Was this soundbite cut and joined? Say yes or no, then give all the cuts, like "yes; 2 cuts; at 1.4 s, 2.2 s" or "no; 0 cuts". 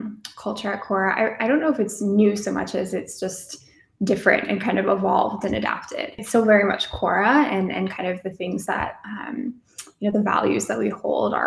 yes; 1 cut; at 6.2 s